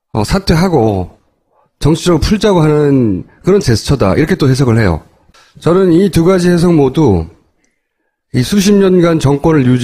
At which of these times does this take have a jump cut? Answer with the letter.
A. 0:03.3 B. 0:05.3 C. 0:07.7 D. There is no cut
C